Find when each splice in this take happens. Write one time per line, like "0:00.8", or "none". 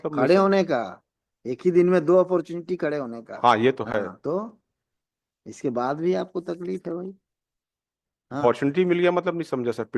none